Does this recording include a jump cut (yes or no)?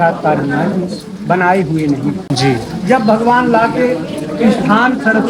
no